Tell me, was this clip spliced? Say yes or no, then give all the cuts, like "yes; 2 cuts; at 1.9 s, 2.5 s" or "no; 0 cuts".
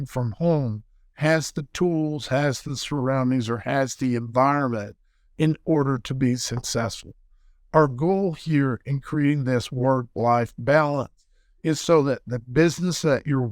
no; 0 cuts